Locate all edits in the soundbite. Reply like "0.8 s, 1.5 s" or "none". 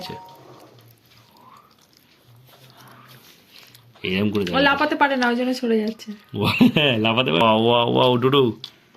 7.4 s